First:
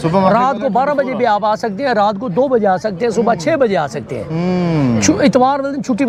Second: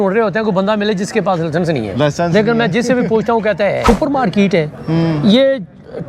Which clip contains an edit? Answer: second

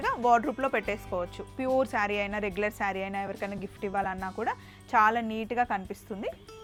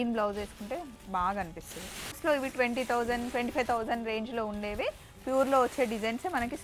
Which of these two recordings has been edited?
second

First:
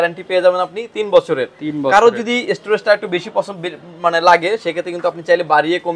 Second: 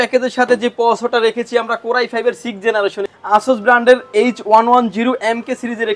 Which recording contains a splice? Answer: second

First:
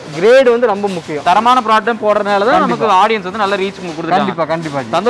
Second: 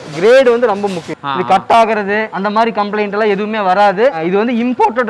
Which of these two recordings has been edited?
second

